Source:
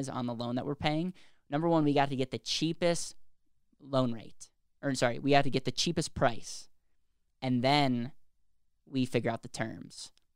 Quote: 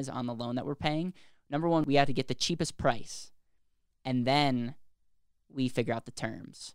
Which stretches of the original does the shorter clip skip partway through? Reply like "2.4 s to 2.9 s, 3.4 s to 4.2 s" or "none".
1.8 s to 5.2 s